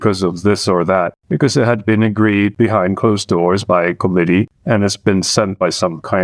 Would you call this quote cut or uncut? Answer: cut